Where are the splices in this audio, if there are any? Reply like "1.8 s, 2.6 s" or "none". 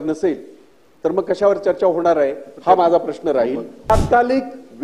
3.9 s